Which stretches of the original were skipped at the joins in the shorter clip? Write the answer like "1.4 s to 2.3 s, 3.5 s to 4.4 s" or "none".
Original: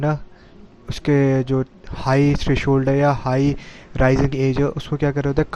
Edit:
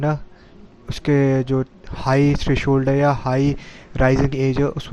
none